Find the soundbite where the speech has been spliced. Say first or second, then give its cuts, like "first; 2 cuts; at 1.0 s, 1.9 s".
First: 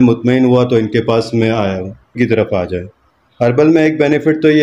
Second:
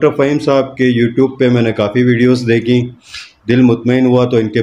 first; 1 cut; at 2.1 s